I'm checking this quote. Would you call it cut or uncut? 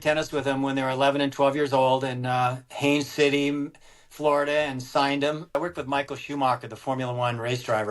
cut